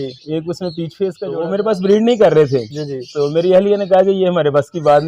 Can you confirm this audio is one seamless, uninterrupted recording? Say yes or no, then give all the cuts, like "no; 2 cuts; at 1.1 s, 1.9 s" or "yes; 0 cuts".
no; 1 cut; at 1.3 s